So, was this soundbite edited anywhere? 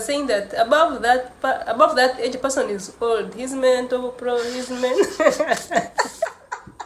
no; 0 cuts

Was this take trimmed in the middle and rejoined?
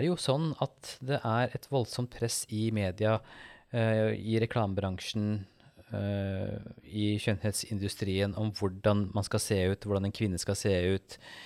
no; 0 cuts

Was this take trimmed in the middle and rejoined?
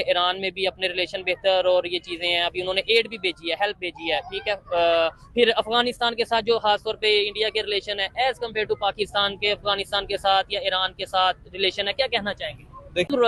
no; 0 cuts

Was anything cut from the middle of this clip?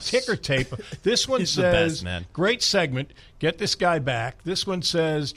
no; 0 cuts

